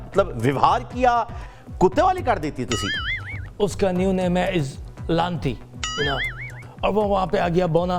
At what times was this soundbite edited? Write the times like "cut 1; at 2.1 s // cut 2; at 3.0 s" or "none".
cut 1; at 1.4 s // cut 2; at 3.3 s // cut 3; at 6.5 s